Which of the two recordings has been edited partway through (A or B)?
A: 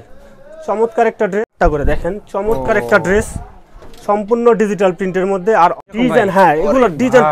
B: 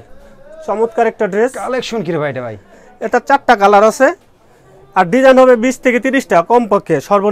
A